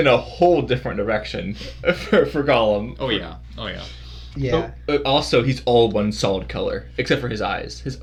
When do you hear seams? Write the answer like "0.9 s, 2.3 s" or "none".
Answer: none